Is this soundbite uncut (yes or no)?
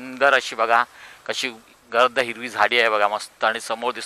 yes